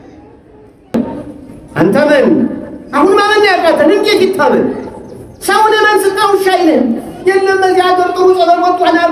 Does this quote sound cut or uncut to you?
cut